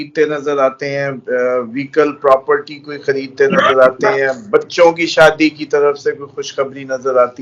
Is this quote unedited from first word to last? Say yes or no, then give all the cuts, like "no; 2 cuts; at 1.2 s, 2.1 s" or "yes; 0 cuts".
yes; 0 cuts